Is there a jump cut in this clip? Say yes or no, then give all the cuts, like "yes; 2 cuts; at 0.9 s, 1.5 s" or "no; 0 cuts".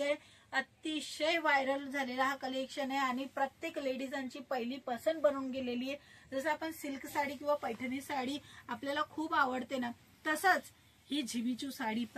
no; 0 cuts